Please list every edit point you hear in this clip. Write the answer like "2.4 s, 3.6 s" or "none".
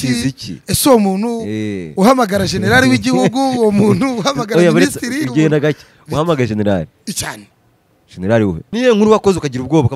8.6 s